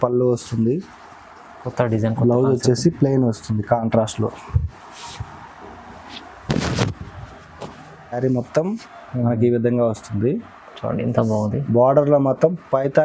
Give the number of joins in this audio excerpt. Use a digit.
1